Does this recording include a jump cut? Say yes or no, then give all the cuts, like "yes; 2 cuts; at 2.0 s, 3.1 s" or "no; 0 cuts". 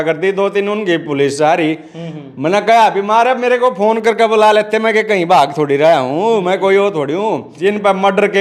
yes; 1 cut; at 7.5 s